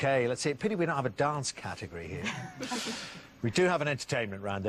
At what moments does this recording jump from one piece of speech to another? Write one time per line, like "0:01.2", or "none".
0:03.2